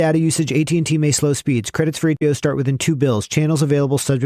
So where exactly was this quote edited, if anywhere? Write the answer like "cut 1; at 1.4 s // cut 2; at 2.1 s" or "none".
cut 1; at 2.2 s

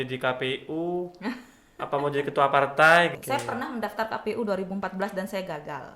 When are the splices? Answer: cut 1; at 3.2 s

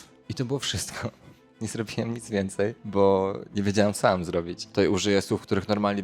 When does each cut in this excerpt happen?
cut 1; at 4.7 s

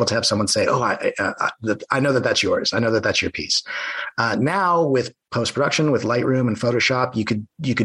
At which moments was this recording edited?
none

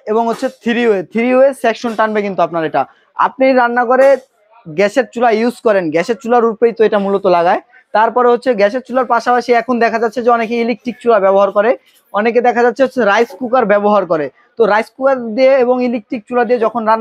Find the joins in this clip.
none

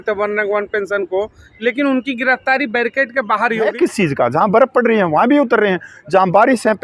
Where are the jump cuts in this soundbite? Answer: cut 1; at 3.7 s

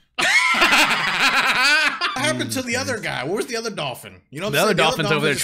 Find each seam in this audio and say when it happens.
cut 1; at 2.2 s

